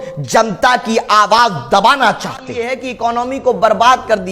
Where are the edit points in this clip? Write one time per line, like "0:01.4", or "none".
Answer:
0:02.7